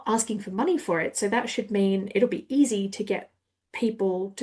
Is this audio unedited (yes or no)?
yes